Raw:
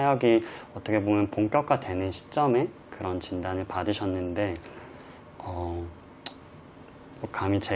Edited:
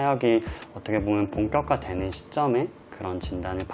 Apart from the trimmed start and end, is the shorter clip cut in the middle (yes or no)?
no